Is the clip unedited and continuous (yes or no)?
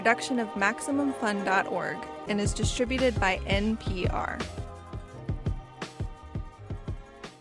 yes